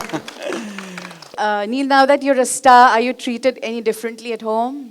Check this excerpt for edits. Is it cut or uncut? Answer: cut